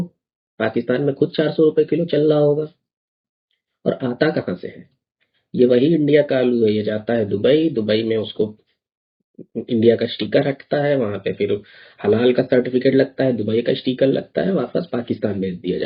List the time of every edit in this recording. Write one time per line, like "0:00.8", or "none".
none